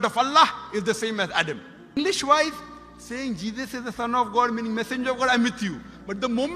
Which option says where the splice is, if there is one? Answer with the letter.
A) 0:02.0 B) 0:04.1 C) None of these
A